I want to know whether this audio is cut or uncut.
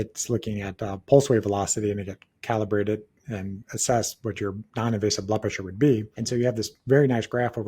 cut